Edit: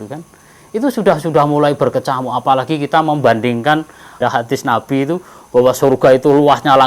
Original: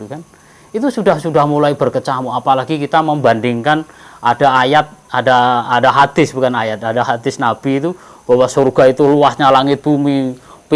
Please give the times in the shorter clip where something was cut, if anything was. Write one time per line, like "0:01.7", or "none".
0:04.1